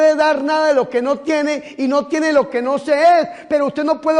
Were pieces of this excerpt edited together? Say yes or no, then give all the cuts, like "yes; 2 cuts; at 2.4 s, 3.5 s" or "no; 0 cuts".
no; 0 cuts